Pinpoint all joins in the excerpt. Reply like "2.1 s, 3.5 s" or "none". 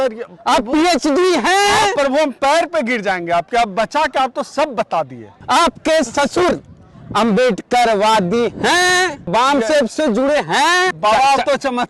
5.4 s, 9.3 s, 10.9 s